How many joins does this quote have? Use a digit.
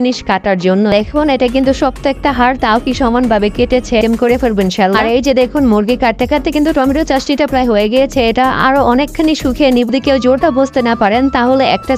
3